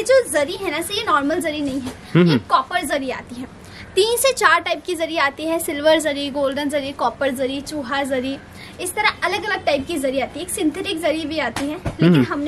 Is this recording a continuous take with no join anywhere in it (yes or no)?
yes